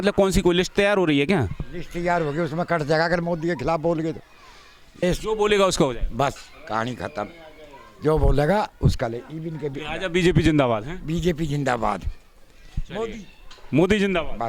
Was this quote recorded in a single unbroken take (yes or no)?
no